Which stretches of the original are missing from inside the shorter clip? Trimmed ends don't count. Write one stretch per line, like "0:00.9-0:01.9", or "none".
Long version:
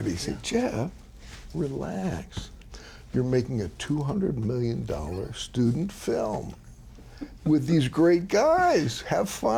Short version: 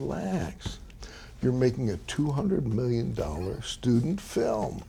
none